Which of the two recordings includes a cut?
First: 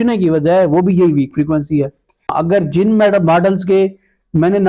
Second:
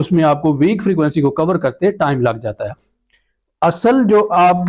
first; 1 cut; at 2.3 s

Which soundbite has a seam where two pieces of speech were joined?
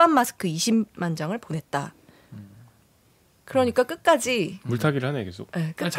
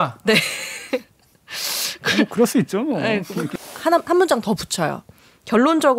second; 1 cut; at 3.5 s

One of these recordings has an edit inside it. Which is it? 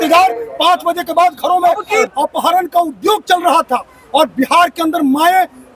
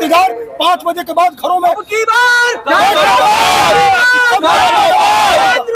first; 1 cut; at 2.1 s

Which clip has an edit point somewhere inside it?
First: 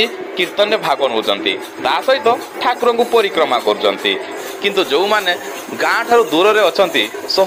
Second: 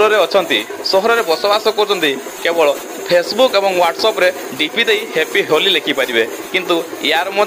first; 1 cut; at 4.4 s

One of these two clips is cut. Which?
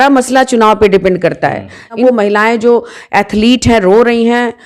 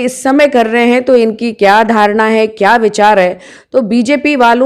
first; 1 cut; at 2.0 s

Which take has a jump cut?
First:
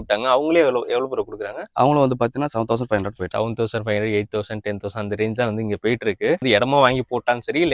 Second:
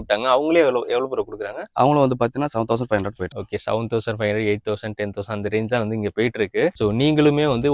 first; 2 cuts; at 3.3 s, 6.4 s

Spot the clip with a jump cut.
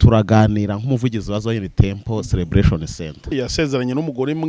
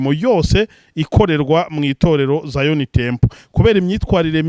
first; 1 cut; at 3.3 s

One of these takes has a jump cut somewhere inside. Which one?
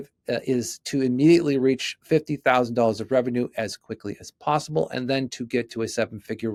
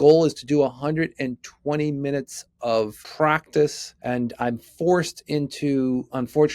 second; 2 cuts; at 3.0 s, 3.9 s

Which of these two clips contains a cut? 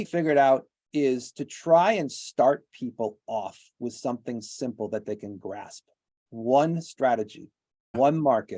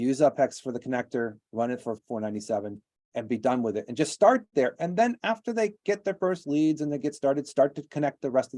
second; 1 cut; at 2.0 s

